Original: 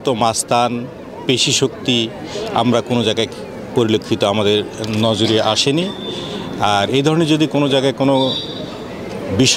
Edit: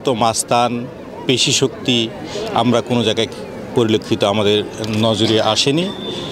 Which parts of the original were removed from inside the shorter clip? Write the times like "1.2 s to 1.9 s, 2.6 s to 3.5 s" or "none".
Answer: none